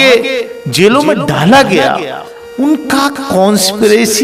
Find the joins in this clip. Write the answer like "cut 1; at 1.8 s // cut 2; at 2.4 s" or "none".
none